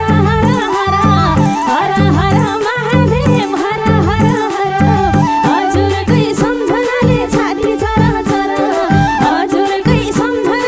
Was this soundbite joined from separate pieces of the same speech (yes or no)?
no